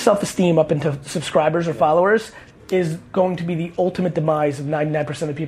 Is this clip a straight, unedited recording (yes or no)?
yes